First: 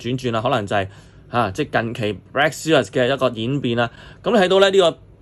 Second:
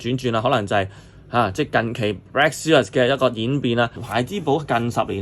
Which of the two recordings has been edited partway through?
second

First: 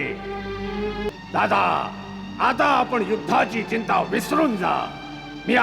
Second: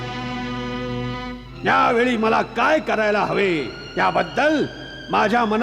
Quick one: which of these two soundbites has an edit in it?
first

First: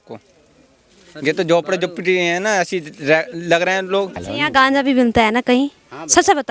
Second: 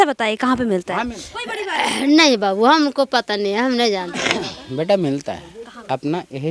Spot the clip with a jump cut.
first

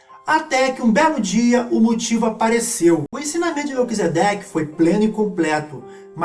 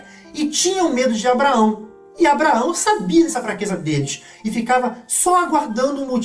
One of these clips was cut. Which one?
first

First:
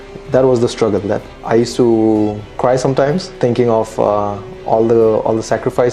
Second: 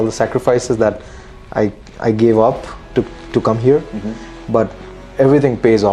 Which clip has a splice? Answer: first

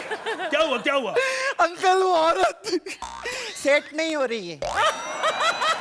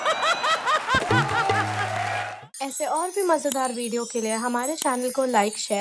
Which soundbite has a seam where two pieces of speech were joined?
second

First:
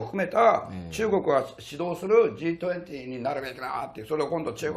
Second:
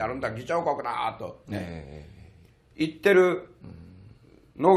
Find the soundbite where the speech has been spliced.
first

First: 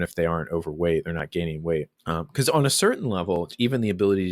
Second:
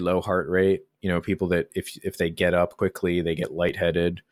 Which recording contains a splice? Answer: first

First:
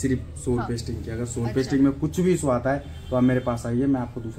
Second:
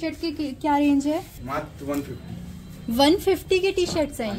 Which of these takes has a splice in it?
second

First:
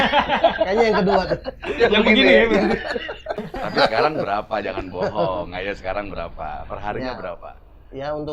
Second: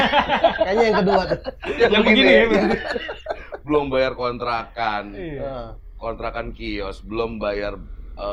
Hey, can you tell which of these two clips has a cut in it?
first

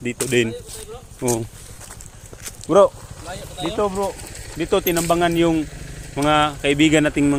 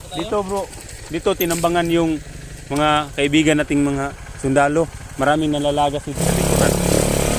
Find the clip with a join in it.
second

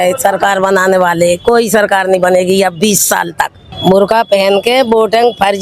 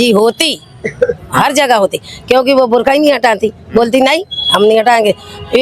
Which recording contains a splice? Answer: first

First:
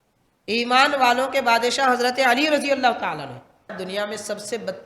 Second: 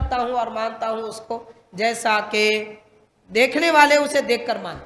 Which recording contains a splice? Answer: first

